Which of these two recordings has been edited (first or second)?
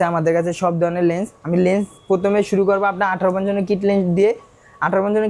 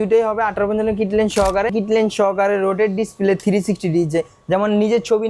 second